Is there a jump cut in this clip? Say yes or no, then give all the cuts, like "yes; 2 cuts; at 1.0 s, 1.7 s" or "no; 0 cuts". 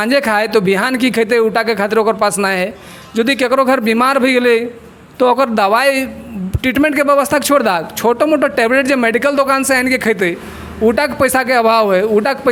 no; 0 cuts